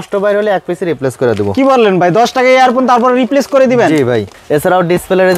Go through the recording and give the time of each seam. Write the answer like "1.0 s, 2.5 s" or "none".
4.3 s